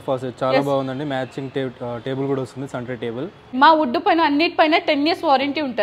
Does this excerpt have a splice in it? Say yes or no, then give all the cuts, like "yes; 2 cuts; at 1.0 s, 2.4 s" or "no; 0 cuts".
yes; 1 cut; at 3.5 s